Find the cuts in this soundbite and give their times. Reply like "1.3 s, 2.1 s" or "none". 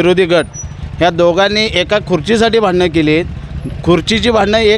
none